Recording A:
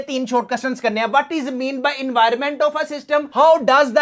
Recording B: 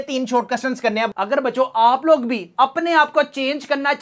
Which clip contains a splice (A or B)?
B